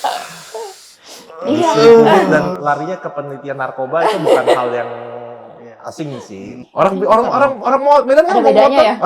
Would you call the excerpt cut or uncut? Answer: cut